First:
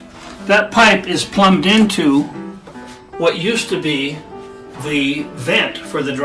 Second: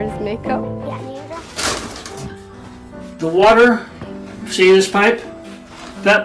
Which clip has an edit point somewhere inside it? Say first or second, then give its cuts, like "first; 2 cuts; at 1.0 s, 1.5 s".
second; 1 cut; at 1.1 s